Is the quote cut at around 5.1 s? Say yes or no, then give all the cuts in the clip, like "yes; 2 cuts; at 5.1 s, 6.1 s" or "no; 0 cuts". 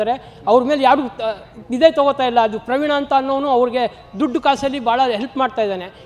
no; 0 cuts